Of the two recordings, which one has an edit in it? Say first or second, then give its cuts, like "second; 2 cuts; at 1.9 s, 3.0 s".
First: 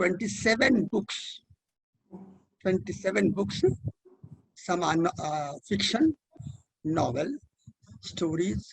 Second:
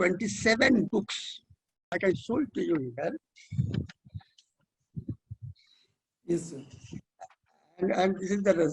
second; 1 cut; at 1.9 s